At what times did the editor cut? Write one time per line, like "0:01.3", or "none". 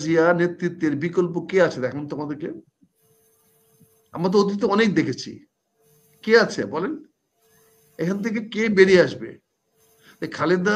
none

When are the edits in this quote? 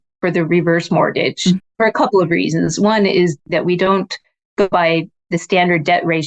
0:01.6
0:03.4
0:04.7

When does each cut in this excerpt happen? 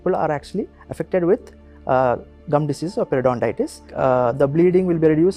0:03.9

